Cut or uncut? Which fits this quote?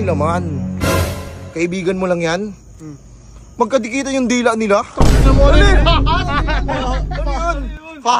uncut